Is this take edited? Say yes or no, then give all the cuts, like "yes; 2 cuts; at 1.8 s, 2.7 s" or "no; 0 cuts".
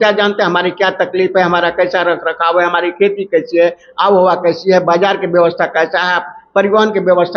no; 0 cuts